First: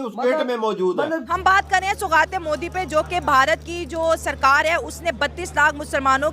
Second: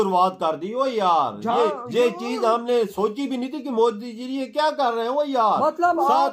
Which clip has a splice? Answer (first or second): first